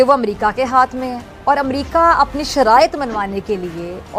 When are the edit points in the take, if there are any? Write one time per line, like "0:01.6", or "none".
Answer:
none